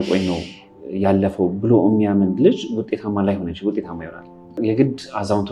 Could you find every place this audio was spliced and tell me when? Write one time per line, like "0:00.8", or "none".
0:04.6